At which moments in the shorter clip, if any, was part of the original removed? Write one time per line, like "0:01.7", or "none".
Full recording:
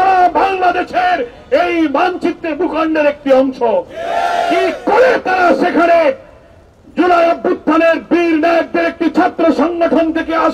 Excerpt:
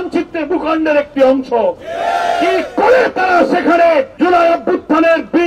0:04.1